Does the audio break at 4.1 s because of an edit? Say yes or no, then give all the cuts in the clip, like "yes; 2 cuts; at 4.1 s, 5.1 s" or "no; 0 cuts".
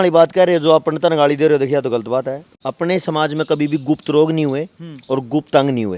no; 1 cut; at 2.4 s